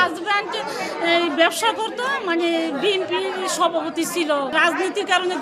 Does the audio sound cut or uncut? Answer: uncut